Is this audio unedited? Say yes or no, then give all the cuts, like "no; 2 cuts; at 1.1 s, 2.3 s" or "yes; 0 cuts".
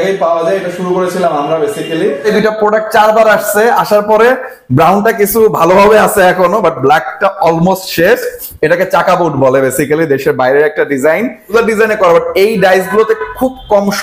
no; 2 cuts; at 2.3 s, 11.5 s